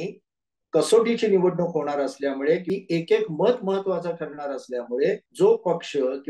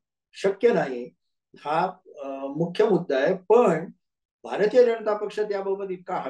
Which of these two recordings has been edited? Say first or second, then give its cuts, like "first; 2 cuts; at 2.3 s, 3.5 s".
first; 2 cuts; at 2.6 s, 5.3 s